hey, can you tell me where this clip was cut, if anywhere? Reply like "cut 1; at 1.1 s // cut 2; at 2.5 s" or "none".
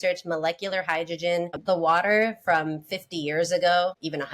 cut 1; at 1.6 s

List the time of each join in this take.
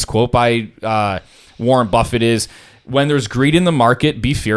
none

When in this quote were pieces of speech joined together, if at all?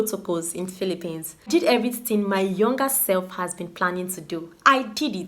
cut 1; at 1.5 s

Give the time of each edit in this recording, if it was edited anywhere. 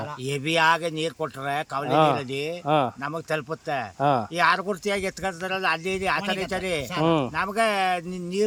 none

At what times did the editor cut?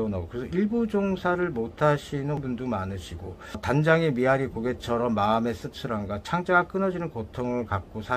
cut 1; at 2.4 s // cut 2; at 3.6 s

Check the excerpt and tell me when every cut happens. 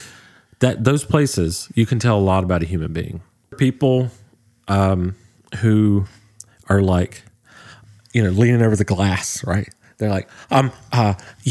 cut 1; at 3.6 s

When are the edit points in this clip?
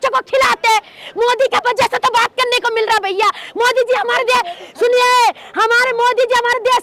none

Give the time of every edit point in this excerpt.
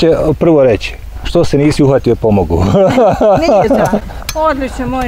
cut 1; at 4.0 s

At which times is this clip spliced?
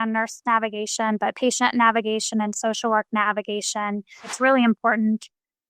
cut 1; at 4.3 s

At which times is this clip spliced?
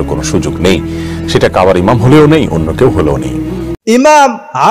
cut 1; at 3.7 s

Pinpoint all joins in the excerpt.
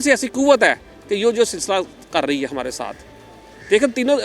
none

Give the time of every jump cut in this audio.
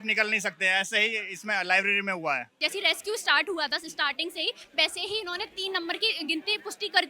cut 1; at 2.6 s

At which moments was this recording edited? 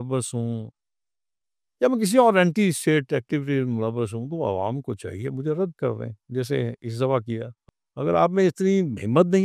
cut 1; at 7.6 s

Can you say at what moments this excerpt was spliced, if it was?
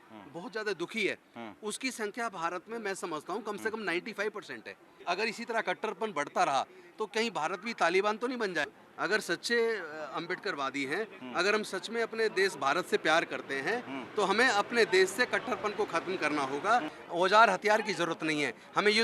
cut 1; at 4.9 s // cut 2; at 8.7 s // cut 3; at 17.0 s

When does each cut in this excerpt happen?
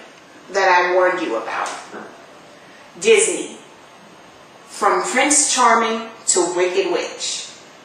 cut 1; at 3.4 s

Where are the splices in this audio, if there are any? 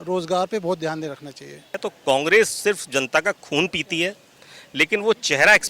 cut 1; at 1.9 s

